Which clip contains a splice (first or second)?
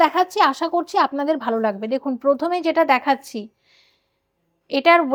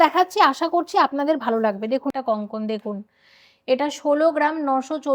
second